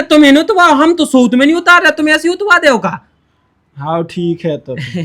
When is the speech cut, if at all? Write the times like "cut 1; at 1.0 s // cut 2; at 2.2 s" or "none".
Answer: none